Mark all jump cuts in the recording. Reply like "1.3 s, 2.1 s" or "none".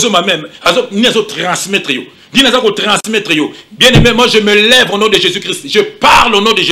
none